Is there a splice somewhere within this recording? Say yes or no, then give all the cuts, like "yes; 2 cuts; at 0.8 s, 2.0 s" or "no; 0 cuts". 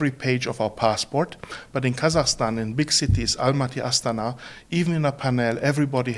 no; 0 cuts